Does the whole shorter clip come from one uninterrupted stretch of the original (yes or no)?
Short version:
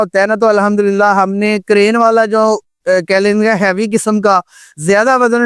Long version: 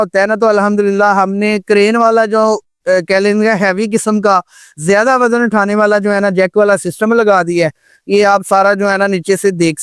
yes